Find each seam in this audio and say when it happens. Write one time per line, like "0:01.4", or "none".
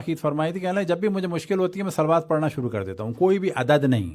none